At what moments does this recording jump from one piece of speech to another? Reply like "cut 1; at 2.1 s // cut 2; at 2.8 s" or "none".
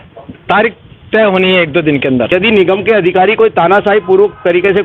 cut 1; at 2.3 s